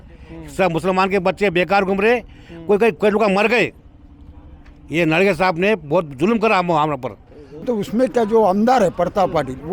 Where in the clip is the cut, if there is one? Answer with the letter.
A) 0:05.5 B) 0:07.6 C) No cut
B